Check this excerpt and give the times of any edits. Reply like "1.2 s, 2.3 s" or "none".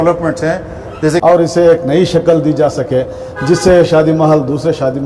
1.2 s